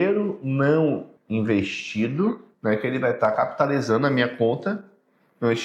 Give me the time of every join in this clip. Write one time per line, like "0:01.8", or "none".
0:01.1
0:02.5